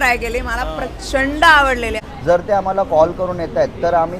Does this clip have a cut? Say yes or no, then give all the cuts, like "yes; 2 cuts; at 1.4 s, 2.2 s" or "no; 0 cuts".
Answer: yes; 1 cut; at 2.0 s